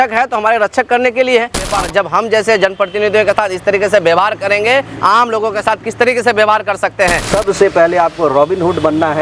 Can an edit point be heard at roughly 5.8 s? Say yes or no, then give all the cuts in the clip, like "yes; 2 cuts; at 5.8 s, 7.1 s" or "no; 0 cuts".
no; 2 cuts; at 1.7 s, 7.2 s